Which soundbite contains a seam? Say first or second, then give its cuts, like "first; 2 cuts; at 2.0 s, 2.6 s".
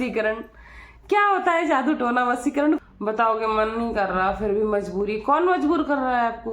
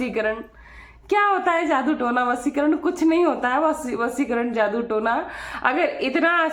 first; 1 cut; at 2.8 s